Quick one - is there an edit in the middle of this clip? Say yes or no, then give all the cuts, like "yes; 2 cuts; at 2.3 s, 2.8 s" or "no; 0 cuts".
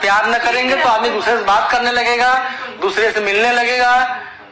no; 0 cuts